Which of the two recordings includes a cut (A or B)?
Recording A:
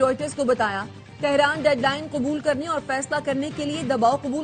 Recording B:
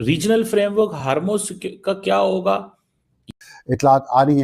B